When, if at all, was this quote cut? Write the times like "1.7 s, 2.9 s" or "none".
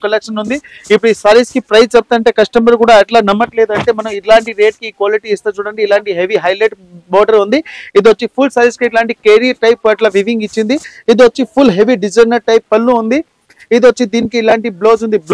none